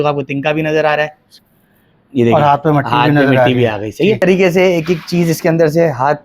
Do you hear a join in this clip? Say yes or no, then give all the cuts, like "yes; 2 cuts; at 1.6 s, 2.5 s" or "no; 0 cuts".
yes; 2 cuts; at 1.2 s, 4.2 s